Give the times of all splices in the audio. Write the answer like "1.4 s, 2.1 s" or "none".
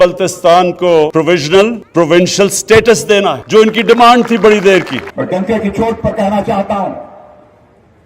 1.1 s, 1.8 s, 3.4 s, 5.0 s